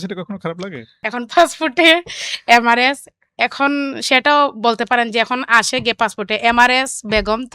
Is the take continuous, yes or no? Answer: no